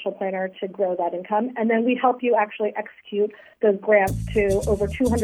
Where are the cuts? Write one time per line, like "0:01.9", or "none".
none